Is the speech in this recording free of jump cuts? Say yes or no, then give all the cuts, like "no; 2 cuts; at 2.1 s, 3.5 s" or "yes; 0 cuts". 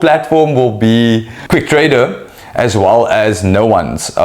no; 1 cut; at 1.4 s